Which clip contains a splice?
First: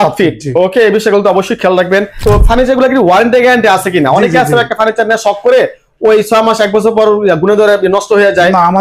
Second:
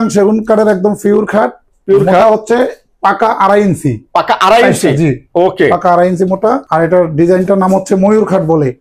first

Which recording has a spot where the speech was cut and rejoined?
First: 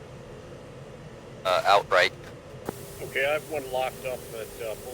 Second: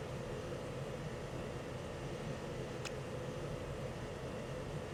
first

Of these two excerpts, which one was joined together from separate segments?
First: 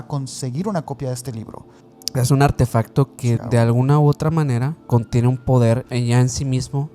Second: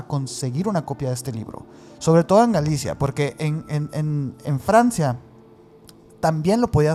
first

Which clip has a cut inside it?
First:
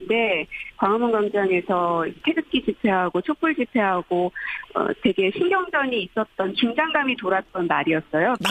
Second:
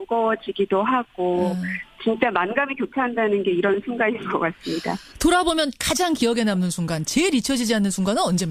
second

